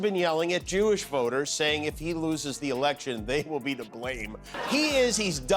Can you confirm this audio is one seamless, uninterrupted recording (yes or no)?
no